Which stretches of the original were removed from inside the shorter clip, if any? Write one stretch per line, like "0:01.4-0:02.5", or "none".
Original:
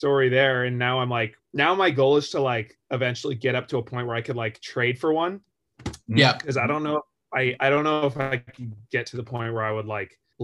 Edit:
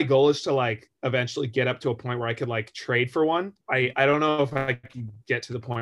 0:05.4-0:07.2